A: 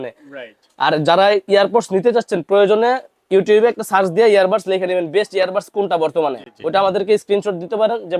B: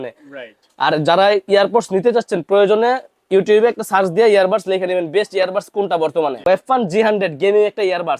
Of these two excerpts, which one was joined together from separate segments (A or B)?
B